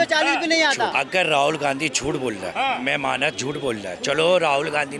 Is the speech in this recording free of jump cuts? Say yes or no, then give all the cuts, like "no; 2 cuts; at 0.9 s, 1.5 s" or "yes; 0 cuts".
no; 2 cuts; at 0.9 s, 2.5 s